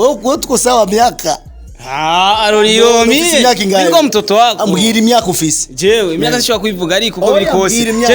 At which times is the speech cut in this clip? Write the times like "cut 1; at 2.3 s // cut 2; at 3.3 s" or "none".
none